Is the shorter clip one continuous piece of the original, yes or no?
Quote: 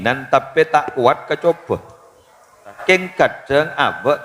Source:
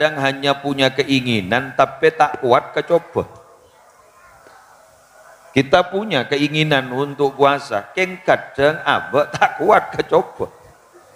no